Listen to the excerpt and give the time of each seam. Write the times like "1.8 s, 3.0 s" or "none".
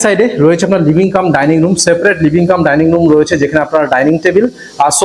none